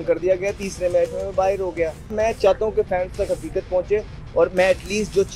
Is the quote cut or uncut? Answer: cut